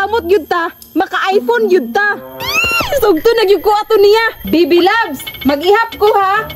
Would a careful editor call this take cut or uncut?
cut